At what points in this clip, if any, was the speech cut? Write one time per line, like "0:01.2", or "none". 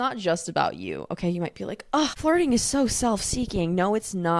0:02.2